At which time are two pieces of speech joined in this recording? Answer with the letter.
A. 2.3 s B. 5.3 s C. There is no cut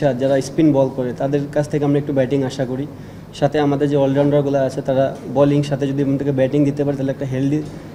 C